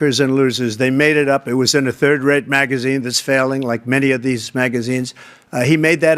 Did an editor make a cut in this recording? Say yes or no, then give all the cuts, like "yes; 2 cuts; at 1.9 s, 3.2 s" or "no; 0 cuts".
no; 0 cuts